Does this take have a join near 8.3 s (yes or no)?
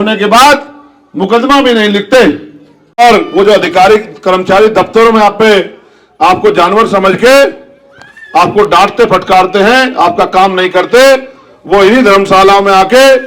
no